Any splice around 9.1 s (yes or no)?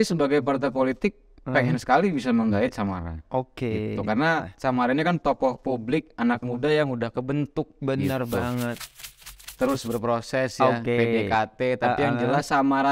yes